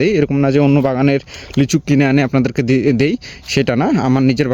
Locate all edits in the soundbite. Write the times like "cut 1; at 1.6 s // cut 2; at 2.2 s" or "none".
none